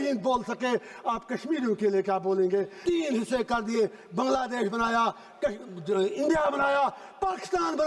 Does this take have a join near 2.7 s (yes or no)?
yes